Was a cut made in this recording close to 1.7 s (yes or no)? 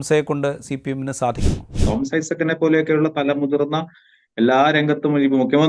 yes